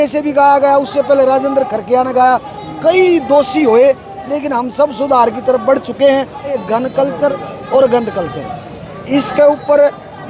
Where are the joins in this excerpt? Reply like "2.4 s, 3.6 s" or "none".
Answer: 6.6 s